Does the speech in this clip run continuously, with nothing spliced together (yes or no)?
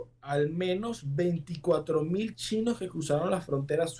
yes